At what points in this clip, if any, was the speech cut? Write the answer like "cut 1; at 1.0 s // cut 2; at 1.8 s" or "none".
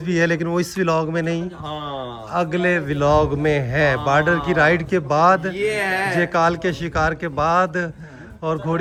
none